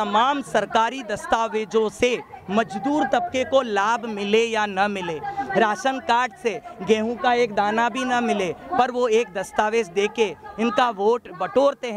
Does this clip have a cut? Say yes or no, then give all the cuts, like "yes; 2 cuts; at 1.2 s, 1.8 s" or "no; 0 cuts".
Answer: no; 0 cuts